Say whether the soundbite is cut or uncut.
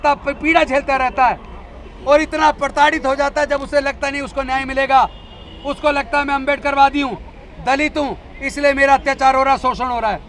uncut